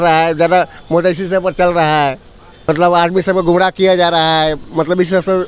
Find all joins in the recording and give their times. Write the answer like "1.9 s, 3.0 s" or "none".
2.7 s